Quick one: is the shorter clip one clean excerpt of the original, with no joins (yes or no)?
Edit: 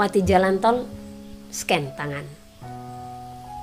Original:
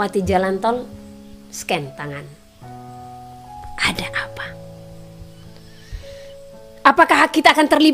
yes